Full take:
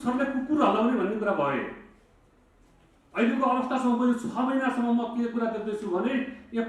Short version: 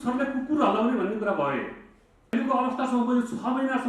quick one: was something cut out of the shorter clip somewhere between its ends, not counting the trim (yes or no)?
yes